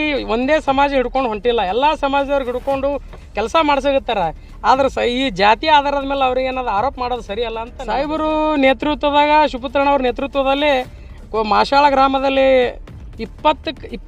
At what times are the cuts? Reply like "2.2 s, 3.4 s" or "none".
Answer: 7.8 s